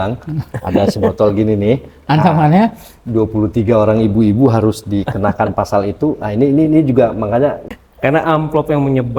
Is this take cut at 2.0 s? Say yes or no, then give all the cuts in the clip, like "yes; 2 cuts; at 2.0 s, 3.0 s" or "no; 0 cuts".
no; 1 cut; at 7.7 s